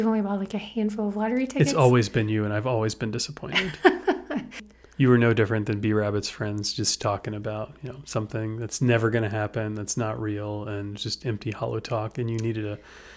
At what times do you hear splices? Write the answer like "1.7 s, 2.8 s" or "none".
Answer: 4.6 s